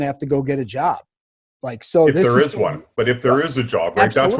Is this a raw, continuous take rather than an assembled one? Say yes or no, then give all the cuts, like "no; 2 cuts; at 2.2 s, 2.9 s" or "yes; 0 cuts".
yes; 0 cuts